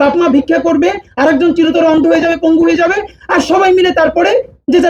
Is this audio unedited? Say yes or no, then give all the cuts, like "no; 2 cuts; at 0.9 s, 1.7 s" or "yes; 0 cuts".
yes; 0 cuts